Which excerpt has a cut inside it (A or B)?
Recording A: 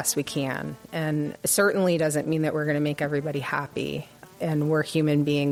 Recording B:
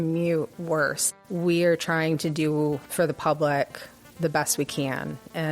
B